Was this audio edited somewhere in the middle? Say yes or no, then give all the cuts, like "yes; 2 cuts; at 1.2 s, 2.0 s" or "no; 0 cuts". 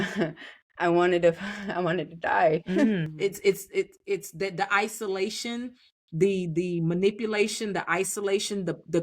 yes; 1 cut; at 3.1 s